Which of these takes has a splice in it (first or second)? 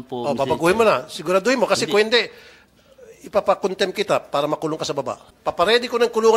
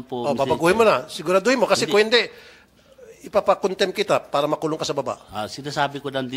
first